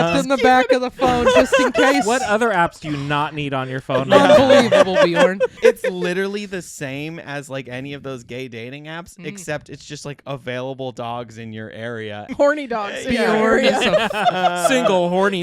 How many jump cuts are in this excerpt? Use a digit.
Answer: 2